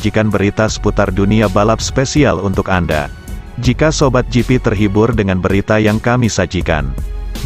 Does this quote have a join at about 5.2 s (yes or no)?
no